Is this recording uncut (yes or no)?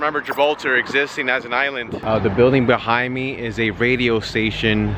no